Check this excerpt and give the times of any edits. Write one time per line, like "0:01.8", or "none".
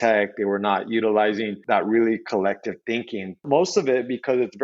0:01.6
0:03.4